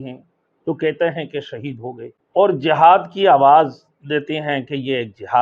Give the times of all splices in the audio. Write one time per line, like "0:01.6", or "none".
0:02.1